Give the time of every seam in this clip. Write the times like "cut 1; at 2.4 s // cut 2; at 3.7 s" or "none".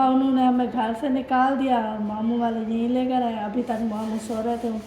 none